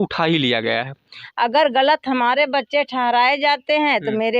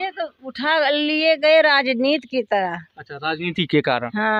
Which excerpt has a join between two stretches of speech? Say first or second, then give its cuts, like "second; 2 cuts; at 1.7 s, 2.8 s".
first; 1 cut; at 1.2 s